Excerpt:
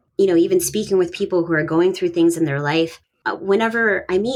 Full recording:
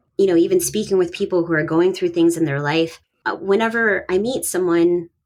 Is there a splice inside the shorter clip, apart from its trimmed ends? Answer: no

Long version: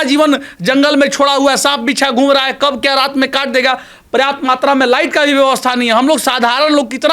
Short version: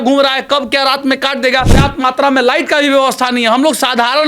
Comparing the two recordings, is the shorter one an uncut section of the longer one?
no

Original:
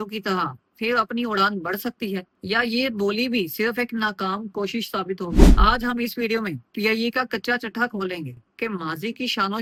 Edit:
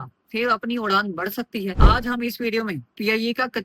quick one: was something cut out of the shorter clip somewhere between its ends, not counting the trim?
yes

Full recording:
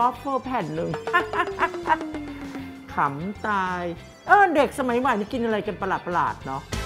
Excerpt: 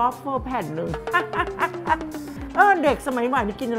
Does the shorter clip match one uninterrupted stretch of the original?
no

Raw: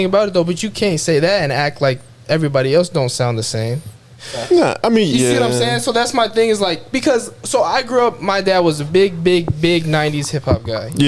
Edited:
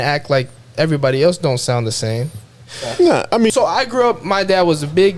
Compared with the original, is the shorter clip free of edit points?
no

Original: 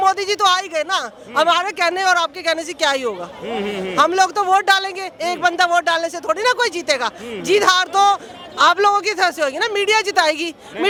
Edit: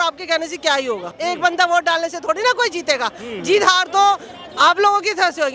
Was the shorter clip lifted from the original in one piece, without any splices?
no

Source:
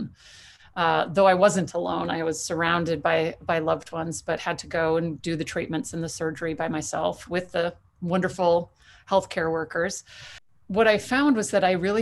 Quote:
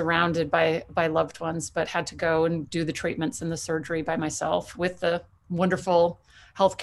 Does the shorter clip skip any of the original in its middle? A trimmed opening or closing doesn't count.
no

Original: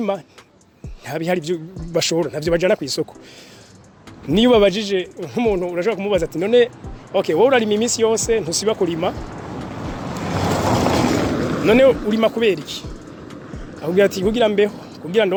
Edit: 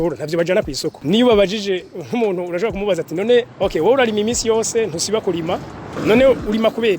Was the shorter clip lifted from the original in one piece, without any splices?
no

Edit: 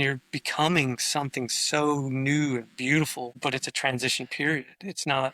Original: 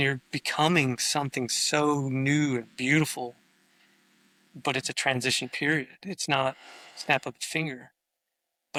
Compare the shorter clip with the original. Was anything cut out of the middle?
yes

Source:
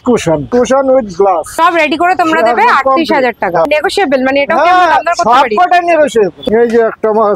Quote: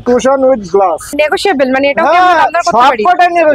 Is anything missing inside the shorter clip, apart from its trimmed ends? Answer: yes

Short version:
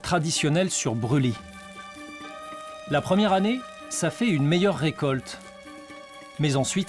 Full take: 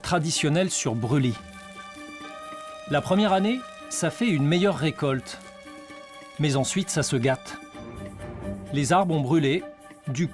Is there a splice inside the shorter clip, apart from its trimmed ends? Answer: no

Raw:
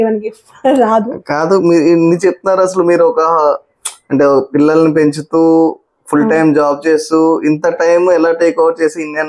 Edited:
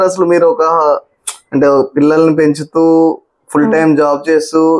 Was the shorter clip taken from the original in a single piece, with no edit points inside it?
yes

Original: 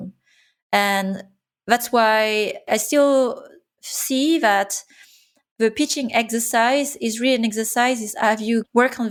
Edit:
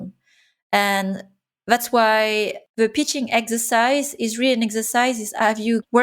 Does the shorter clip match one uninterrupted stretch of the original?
no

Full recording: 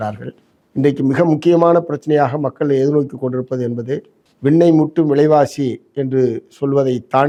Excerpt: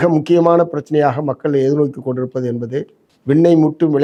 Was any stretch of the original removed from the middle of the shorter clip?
no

